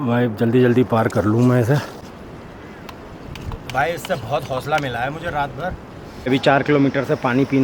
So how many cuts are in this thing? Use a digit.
2